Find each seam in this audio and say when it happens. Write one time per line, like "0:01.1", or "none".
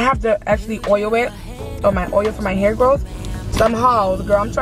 0:03.5